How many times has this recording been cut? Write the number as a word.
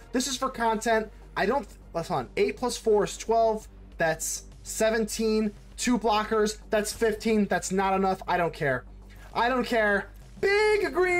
zero